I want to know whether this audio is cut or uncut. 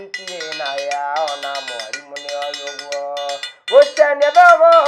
uncut